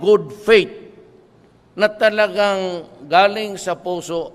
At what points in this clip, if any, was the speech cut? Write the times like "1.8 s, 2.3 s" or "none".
1.2 s